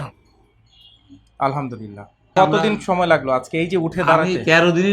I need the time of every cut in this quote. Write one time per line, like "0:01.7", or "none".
0:02.3